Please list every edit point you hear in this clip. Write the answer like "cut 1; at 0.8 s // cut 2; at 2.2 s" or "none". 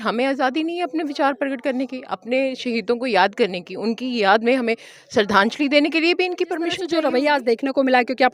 cut 1; at 6.9 s